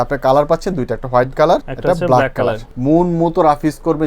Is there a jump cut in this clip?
yes; 2 cuts; at 1.7 s, 2.7 s

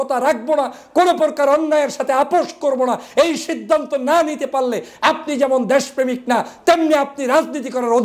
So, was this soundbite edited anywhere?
no; 0 cuts

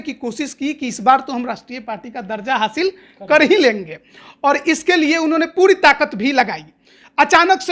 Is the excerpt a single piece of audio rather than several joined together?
yes; 0 cuts

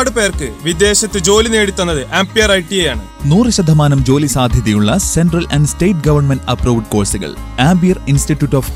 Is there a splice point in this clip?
no; 0 cuts

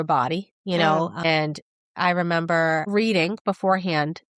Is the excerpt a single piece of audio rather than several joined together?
yes; 0 cuts

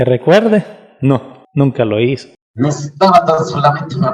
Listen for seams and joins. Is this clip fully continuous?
no; 2 cuts; at 1.4 s, 2.4 s

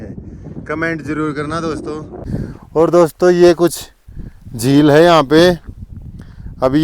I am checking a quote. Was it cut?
yes; 1 cut; at 2.3 s

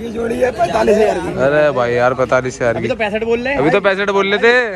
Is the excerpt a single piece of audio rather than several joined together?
yes; 0 cuts

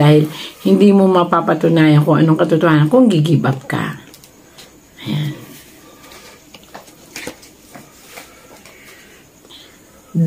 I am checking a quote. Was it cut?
no; 0 cuts

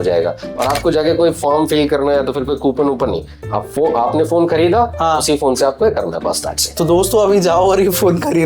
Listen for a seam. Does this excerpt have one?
no; 0 cuts

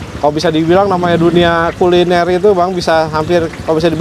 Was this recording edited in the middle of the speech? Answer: no; 0 cuts

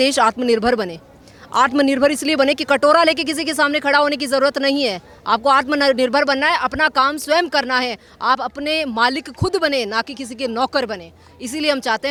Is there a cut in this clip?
no; 0 cuts

